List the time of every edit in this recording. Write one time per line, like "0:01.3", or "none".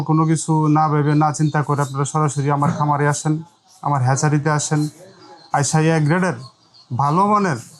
none